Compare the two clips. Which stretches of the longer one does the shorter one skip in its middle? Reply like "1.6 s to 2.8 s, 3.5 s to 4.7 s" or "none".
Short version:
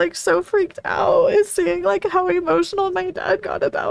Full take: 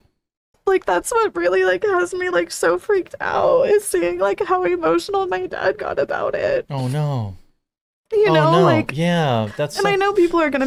none